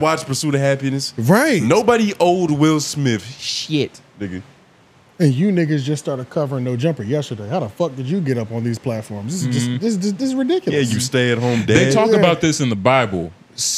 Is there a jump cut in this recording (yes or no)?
no